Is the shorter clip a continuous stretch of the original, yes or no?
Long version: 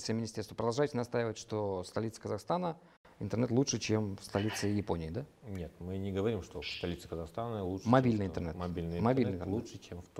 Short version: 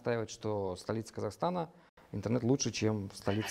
yes